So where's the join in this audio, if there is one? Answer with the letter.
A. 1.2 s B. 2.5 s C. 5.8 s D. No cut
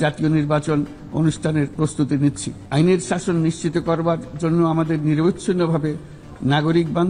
B